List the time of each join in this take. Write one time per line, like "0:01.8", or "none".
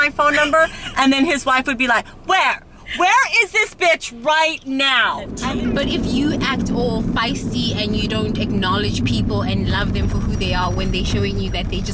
0:05.3